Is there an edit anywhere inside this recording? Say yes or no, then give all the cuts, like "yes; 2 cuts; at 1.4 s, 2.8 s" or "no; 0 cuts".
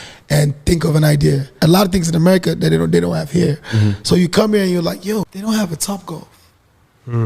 yes; 2 cuts; at 1.6 s, 5.3 s